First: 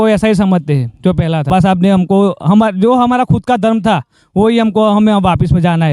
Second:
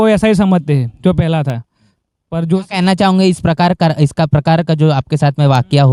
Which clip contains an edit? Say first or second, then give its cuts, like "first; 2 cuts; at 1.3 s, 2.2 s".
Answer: first; 1 cut; at 1.5 s